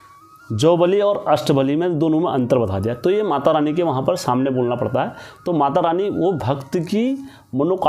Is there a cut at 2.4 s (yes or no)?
no